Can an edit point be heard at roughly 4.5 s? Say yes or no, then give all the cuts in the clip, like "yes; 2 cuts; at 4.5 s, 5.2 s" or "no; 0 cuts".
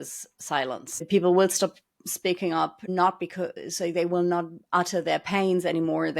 no; 2 cuts; at 1.1 s, 2.9 s